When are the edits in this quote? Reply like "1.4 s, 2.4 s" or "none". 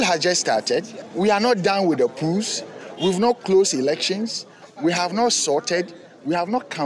1.0 s